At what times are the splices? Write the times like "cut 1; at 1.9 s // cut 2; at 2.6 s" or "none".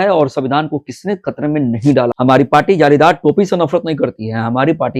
cut 1; at 2.1 s